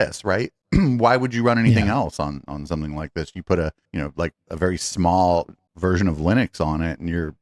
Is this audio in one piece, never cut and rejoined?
yes; 0 cuts

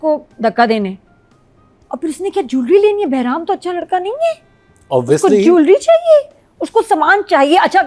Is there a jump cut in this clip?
no; 0 cuts

